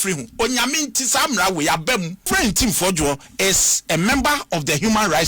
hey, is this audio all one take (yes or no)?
no